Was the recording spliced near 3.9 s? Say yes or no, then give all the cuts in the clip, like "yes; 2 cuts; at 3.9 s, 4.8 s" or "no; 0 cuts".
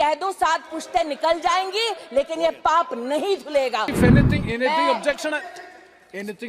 yes; 1 cut; at 3.9 s